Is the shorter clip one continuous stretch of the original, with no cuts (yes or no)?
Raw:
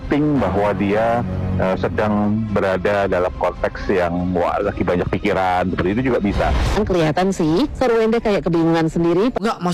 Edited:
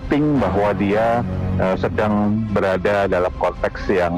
yes